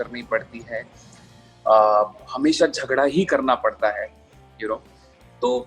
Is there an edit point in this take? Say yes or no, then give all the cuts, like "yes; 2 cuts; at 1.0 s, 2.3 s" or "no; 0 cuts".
no; 0 cuts